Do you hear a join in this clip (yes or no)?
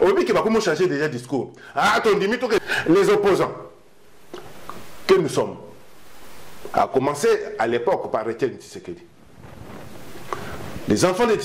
yes